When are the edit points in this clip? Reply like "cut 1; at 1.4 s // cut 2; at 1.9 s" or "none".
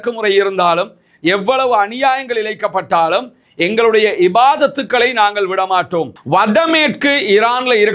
cut 1; at 6.2 s

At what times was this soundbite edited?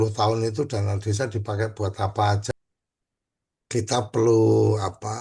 cut 1; at 2.5 s

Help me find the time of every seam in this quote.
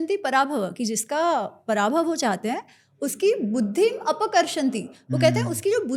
none

